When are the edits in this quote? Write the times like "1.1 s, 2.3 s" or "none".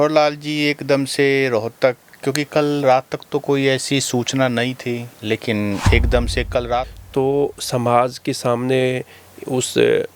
7.0 s

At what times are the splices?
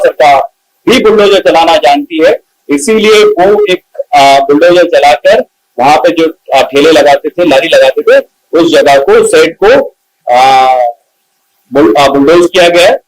none

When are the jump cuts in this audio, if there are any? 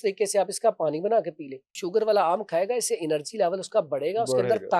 1.8 s

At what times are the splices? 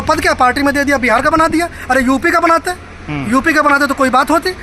none

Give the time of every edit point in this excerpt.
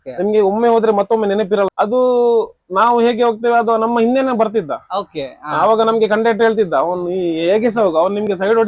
1.7 s

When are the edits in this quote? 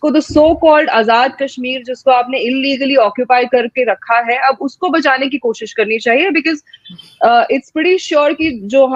none

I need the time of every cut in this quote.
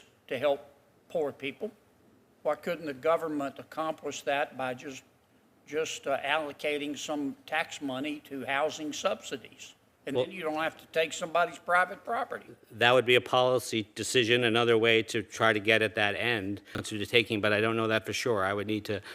16.8 s

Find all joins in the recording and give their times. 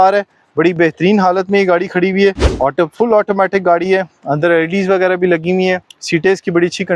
2.5 s, 5.9 s

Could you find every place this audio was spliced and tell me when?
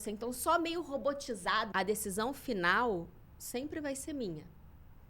1.7 s

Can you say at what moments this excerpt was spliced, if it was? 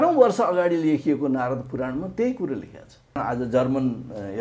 3.2 s

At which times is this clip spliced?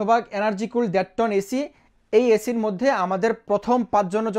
none

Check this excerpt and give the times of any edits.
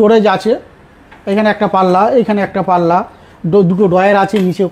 none

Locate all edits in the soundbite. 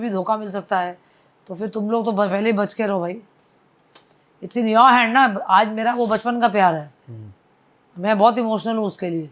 none

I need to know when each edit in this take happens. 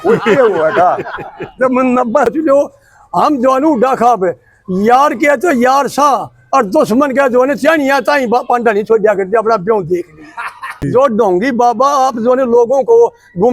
2.3 s, 10.7 s

